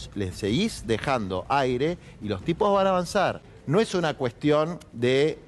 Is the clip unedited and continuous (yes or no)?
no